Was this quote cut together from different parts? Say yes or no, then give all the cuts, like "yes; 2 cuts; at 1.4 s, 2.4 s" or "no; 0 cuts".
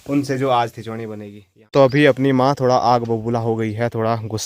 yes; 1 cut; at 1.6 s